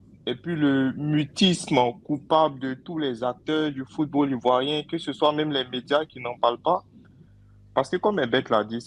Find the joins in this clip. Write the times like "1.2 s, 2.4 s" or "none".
none

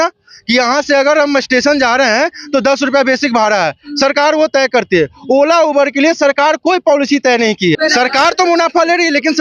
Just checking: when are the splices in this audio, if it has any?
7.8 s

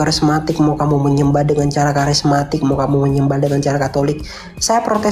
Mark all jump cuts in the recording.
none

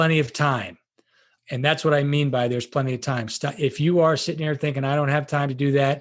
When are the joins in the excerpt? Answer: 1.3 s

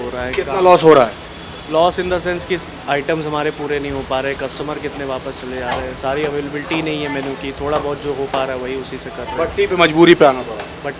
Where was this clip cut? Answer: none

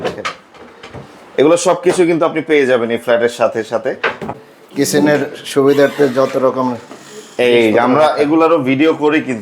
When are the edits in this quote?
4.3 s

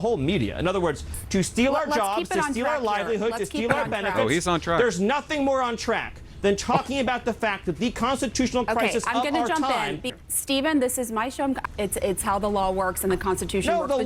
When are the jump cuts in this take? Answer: 1.2 s, 10.1 s, 11.7 s

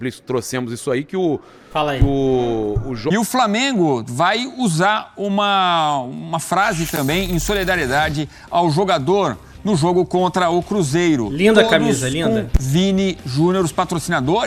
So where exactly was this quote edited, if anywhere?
3.0 s

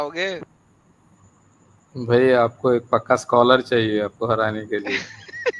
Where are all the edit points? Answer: none

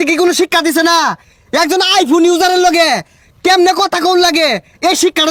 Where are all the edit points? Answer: none

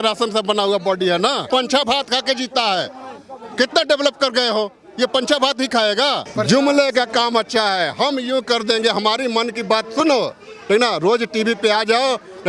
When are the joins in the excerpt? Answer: 1.5 s, 6.3 s

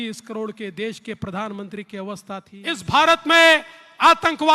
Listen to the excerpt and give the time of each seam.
2.8 s

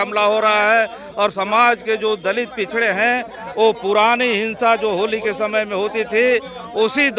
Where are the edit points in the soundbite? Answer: none

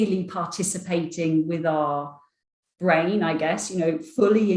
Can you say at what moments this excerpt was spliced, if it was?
none

